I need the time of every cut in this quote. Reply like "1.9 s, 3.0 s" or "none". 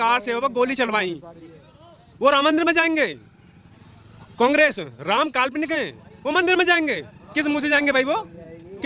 none